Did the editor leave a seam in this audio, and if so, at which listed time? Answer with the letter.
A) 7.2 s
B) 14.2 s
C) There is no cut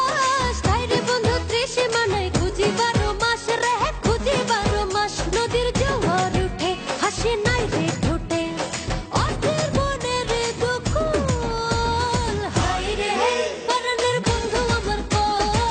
A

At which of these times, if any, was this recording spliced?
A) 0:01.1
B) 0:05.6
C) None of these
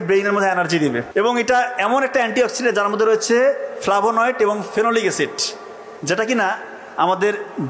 A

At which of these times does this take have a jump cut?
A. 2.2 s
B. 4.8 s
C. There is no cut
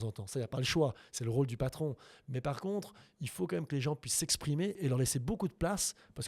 B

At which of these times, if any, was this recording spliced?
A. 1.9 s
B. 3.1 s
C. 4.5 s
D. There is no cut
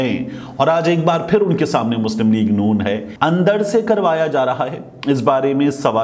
B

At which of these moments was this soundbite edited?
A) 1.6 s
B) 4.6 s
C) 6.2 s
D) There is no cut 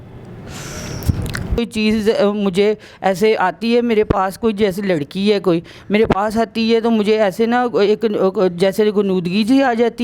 A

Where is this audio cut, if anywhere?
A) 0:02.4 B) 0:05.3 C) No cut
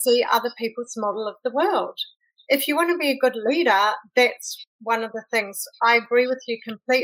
C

